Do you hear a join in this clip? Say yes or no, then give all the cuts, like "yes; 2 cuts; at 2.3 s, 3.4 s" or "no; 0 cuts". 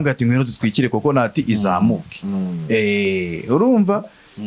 no; 0 cuts